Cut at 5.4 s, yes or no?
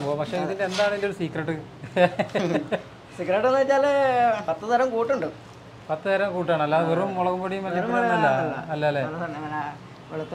no